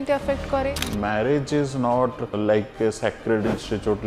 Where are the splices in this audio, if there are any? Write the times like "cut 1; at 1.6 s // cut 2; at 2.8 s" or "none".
cut 1; at 0.7 s // cut 2; at 2.3 s